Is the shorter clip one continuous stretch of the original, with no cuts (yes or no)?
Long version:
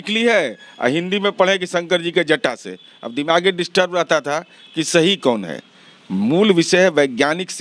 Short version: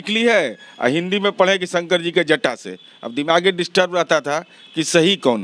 yes